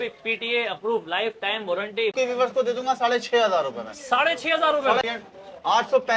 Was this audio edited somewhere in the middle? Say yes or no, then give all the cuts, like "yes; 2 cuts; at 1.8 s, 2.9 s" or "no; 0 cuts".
yes; 2 cuts; at 2.1 s, 5.0 s